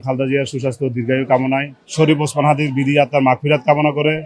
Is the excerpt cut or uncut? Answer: cut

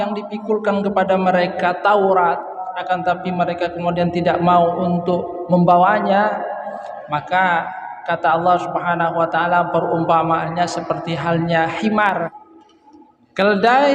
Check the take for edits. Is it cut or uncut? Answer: cut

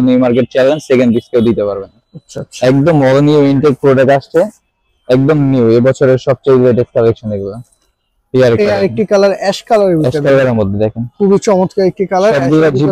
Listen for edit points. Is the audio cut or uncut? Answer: uncut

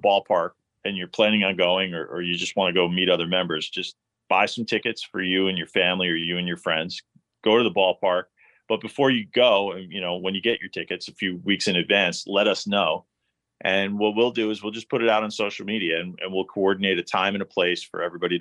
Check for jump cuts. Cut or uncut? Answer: uncut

